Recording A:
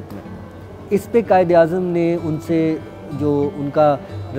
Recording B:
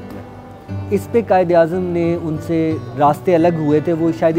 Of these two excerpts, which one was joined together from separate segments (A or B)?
B